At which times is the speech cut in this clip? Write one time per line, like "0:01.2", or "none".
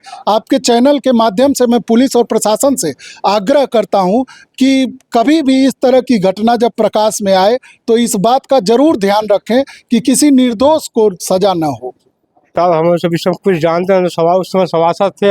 0:12.5